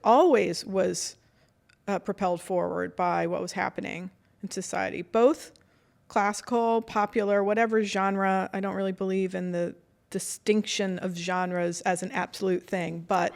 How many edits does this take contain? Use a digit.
0